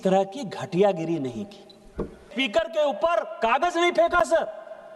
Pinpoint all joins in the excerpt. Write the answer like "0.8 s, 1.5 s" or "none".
2.3 s